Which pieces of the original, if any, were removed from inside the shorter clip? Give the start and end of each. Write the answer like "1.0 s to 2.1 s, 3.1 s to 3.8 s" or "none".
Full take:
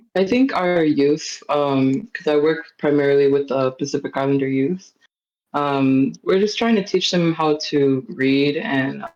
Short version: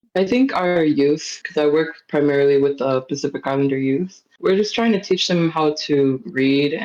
1.4 s to 2.1 s, 5.0 s to 6.2 s

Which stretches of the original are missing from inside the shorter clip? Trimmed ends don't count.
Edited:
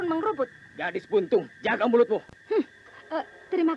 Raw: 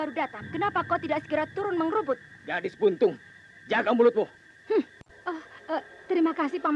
3.2 s to 3.6 s, 4.5 s to 5.0 s

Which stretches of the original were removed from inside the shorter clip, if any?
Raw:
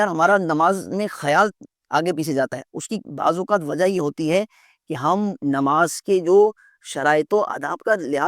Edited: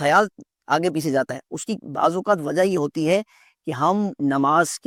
none

